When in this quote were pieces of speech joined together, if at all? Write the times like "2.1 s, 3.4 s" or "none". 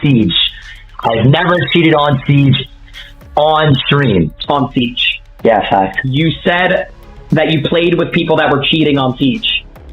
4.4 s